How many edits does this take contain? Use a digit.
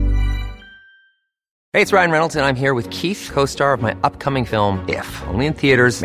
1